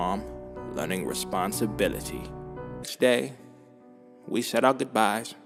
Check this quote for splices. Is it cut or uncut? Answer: uncut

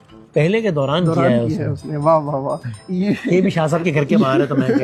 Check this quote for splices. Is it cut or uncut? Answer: uncut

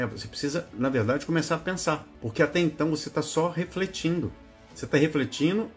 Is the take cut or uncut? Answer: cut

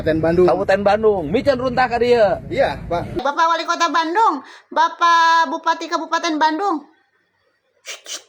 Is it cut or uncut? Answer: cut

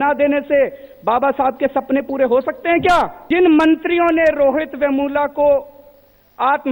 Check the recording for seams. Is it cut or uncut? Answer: cut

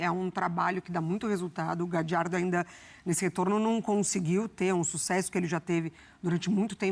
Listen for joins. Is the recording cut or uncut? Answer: uncut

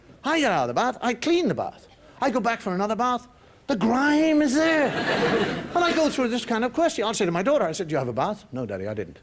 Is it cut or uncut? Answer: cut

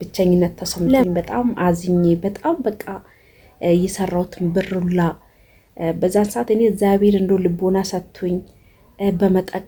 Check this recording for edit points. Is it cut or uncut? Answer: uncut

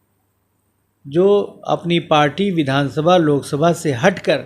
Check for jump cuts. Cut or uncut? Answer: uncut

